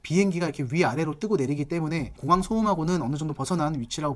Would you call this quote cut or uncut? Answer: uncut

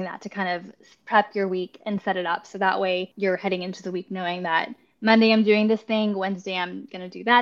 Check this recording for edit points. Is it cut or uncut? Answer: cut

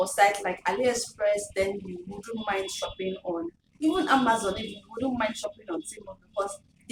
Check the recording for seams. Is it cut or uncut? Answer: uncut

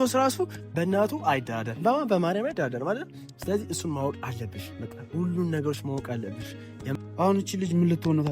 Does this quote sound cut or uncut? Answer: cut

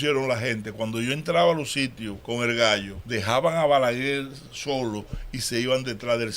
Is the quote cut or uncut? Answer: cut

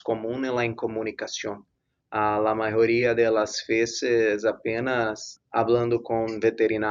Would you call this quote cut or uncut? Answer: cut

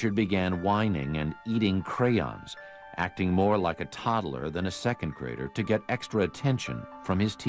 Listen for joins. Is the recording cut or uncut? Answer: uncut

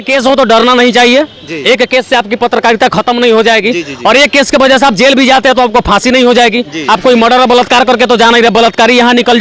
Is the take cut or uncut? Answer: uncut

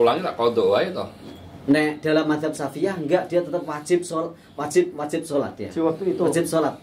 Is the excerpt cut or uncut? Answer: uncut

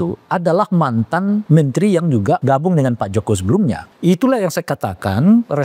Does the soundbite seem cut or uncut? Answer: cut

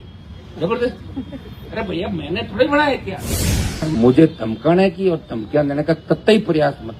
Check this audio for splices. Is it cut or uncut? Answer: cut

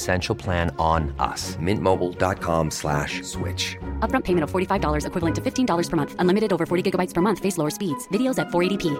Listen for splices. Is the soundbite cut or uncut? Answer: uncut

